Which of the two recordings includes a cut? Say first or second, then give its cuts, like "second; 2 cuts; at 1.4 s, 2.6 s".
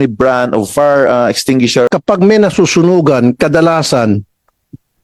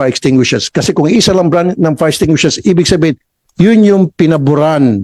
first; 1 cut; at 1.9 s